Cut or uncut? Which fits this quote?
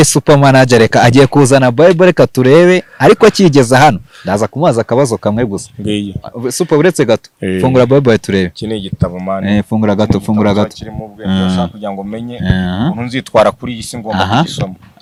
uncut